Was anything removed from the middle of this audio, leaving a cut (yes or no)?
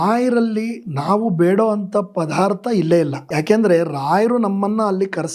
yes